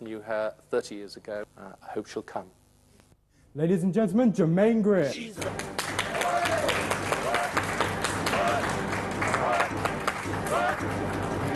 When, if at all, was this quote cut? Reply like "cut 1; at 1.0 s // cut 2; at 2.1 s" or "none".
cut 1; at 10.7 s